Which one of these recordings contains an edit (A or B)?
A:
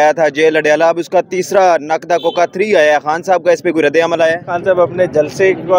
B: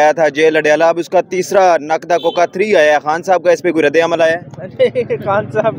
A